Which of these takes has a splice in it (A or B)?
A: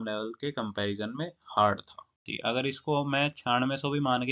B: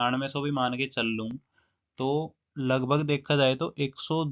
A